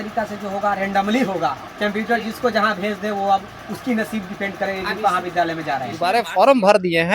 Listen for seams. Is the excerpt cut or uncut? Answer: cut